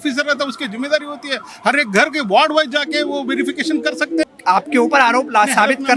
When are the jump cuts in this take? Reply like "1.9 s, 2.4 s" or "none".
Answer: 4.2 s